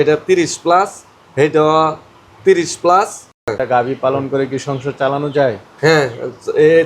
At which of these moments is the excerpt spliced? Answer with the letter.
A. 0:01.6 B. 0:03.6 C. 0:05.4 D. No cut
B